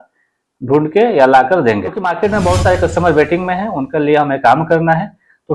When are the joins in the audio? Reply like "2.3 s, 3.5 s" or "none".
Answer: 2.1 s